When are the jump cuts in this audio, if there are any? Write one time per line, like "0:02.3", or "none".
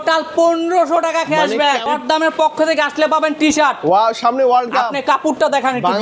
0:01.9

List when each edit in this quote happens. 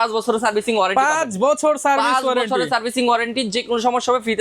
none

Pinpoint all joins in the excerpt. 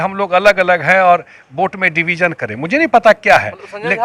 none

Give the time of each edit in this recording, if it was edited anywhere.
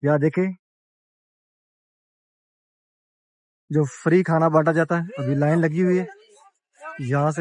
none

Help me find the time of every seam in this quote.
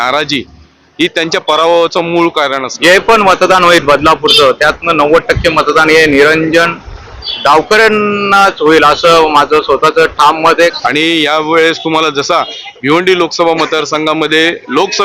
0:02.7
0:10.7

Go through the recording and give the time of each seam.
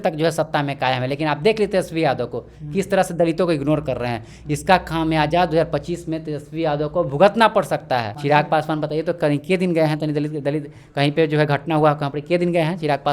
0:08.1

